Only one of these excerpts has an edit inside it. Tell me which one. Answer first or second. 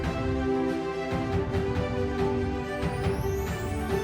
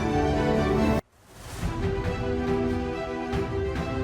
second